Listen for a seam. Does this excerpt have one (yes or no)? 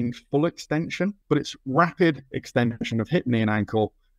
yes